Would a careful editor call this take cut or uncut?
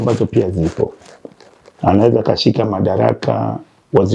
uncut